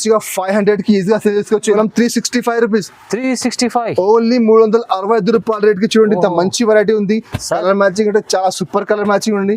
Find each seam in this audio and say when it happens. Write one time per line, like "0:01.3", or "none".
0:01.7